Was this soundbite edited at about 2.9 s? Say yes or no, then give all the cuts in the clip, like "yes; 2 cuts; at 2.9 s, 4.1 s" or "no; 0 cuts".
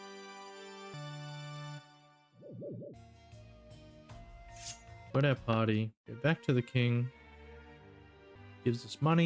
yes; 5 cuts; at 0.9 s, 2.9 s, 5.1 s, 6.0 s, 8.4 s